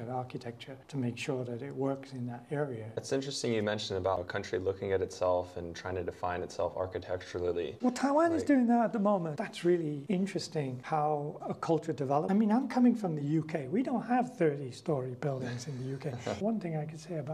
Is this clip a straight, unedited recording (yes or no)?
no